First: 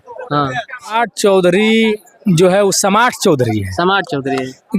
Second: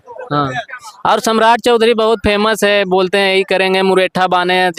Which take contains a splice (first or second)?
first